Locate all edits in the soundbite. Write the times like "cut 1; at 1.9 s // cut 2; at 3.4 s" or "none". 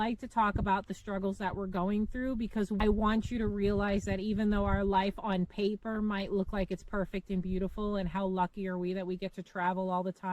cut 1; at 2.8 s